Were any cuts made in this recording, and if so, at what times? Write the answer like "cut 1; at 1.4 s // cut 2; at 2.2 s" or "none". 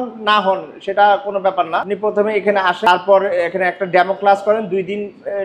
cut 1; at 1.9 s // cut 2; at 2.9 s